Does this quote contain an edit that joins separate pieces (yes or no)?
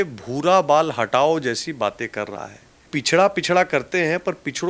yes